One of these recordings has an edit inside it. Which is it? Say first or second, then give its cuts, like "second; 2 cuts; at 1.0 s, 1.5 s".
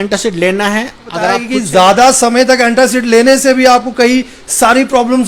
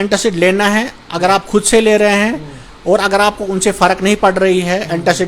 first; 1 cut; at 1.5 s